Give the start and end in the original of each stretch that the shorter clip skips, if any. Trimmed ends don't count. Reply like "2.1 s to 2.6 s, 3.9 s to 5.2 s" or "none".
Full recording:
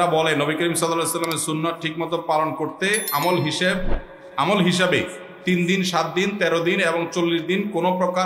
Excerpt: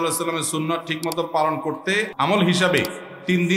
3.0 s to 4.3 s